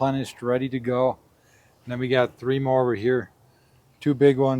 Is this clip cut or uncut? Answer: uncut